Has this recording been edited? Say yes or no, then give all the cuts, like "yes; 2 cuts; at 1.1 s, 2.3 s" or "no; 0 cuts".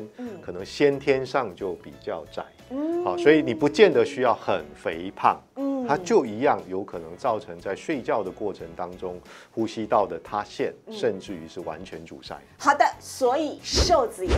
no; 0 cuts